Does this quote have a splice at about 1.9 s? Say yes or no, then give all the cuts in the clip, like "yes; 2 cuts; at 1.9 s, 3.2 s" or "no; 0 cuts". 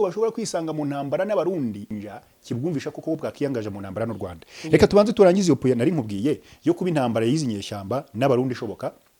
yes; 1 cut; at 1.9 s